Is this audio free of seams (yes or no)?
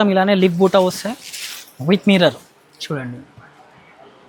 yes